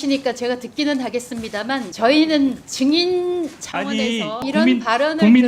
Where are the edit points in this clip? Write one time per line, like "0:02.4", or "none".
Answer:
0:01.9
0:02.7
0:04.4